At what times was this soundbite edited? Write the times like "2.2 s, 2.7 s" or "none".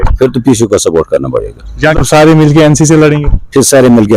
2.0 s